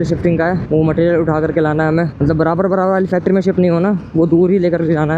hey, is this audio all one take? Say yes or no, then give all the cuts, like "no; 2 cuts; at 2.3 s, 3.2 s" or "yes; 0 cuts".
yes; 0 cuts